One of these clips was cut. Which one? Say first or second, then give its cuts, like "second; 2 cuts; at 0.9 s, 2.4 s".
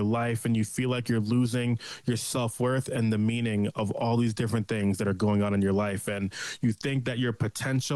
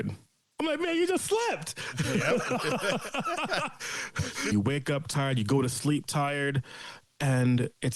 second; 1 cut; at 4.5 s